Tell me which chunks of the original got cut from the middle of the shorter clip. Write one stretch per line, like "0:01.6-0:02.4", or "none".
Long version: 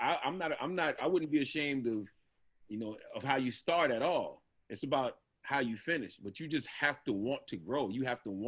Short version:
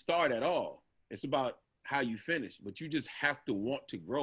none

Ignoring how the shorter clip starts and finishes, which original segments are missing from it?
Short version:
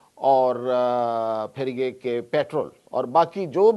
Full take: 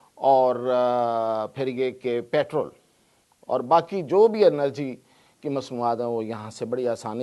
0:02.8-0:03.4

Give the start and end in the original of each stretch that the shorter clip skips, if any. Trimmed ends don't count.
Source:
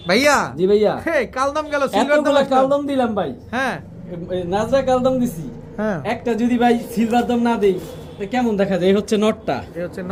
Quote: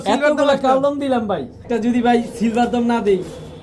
0:03.5-0:06.2

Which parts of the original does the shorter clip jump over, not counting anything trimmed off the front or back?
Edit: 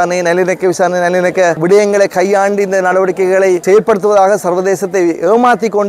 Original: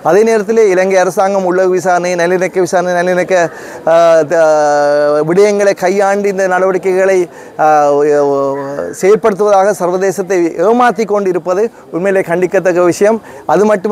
0:03.5-0:05.3
0:07.3-0:09.0

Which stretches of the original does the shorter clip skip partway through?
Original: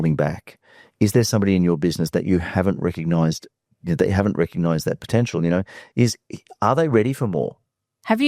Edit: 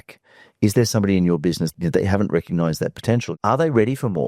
0:02.0-0:03.7
0:05.3-0:06.5

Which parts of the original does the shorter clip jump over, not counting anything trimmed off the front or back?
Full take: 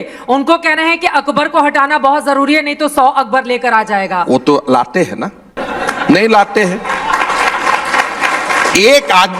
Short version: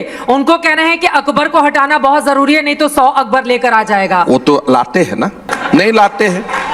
0:05.5-0:05.8

